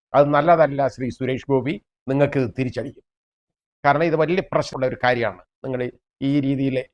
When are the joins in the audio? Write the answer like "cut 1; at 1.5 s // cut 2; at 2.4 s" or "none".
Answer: cut 1; at 4.7 s